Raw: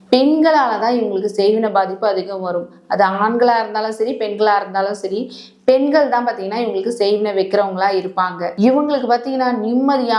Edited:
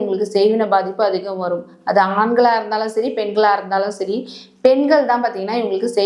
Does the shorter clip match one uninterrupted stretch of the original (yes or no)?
yes